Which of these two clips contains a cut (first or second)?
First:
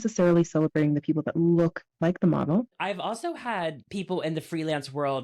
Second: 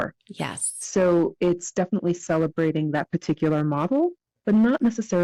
first